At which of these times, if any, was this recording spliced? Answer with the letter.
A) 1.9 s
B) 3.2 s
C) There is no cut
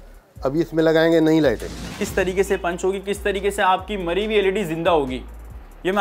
A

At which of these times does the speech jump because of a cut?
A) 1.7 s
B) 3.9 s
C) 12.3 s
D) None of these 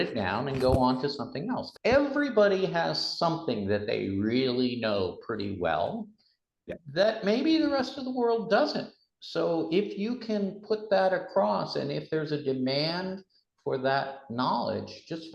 A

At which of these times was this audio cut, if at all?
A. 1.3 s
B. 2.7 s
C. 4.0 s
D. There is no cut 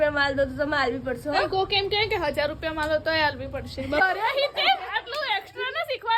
C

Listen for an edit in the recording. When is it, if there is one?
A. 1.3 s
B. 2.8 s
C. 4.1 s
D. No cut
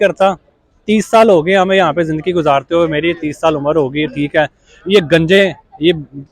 D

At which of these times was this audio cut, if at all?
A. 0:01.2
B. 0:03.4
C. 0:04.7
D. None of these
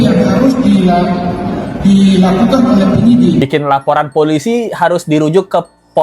B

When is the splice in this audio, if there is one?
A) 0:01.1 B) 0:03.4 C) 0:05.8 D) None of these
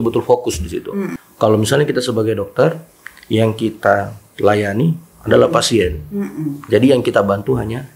A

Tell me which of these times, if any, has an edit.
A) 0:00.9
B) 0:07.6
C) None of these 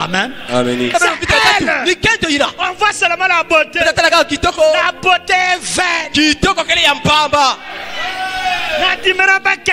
A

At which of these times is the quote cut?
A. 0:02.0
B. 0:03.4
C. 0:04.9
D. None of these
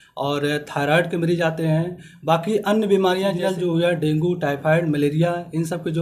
B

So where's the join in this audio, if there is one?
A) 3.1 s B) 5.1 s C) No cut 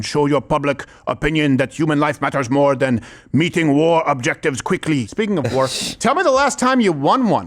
B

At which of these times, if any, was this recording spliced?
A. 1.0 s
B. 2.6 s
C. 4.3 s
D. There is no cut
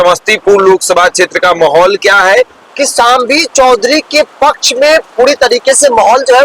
B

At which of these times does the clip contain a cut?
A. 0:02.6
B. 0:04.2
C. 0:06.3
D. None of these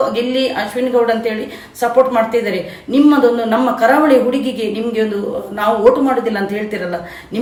D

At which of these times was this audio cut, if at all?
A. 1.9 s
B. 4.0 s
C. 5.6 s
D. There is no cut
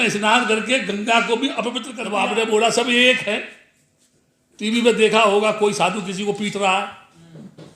A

